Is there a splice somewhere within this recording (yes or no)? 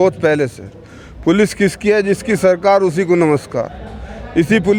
no